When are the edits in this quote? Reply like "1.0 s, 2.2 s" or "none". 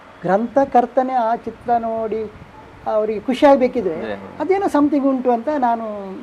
none